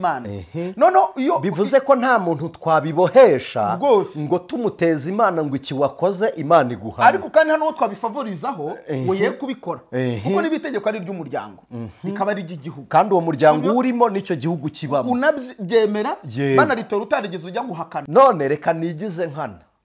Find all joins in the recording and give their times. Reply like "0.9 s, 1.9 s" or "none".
18.0 s